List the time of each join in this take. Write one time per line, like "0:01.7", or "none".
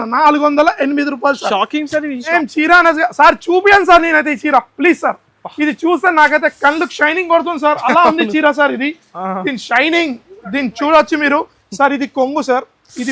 0:02.3

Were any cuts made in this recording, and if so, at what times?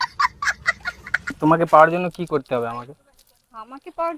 0:01.4

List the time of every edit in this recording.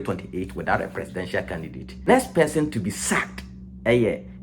0:02.1

